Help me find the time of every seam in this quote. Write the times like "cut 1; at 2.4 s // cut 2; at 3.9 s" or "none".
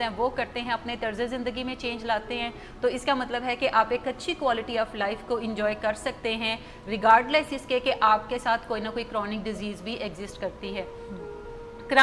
none